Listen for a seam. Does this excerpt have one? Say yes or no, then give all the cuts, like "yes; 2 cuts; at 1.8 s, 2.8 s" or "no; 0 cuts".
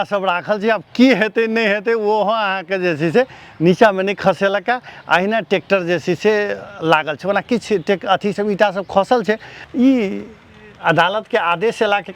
yes; 1 cut; at 9.6 s